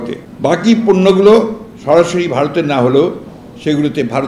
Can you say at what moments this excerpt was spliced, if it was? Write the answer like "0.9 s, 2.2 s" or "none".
none